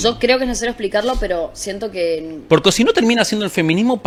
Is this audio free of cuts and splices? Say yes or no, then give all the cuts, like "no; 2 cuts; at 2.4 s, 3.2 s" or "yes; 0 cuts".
yes; 0 cuts